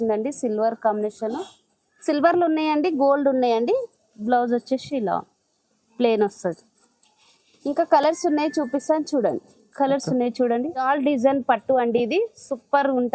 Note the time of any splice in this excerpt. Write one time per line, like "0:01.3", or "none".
0:10.8